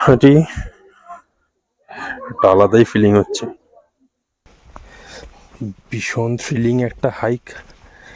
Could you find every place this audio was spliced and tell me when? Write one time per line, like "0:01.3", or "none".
0:04.5